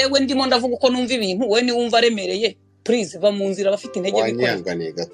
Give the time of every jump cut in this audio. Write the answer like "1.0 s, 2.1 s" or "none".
none